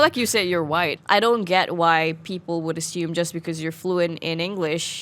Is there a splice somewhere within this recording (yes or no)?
yes